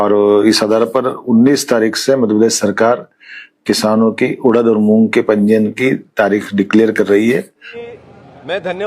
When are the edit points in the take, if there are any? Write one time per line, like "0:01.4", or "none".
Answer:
0:07.7